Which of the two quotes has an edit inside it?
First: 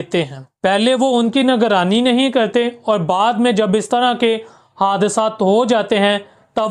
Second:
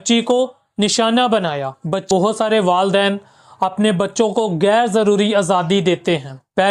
second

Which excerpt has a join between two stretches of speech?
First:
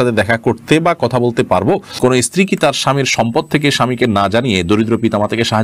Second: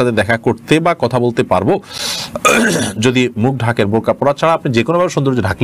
first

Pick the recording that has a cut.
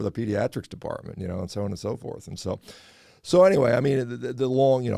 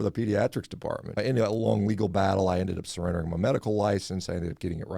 second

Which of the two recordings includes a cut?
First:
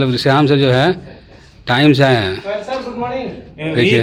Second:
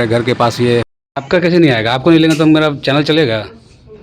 second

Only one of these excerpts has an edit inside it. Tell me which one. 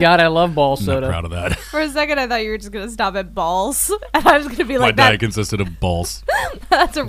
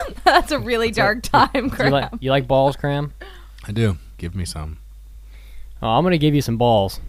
second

